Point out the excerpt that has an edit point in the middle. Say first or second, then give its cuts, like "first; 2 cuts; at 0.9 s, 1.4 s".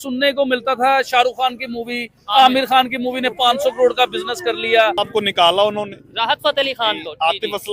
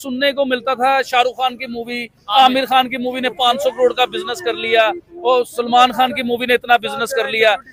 first; 1 cut; at 5.0 s